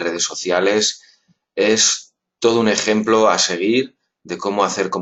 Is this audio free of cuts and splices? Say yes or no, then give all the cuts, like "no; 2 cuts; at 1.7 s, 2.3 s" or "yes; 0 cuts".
yes; 0 cuts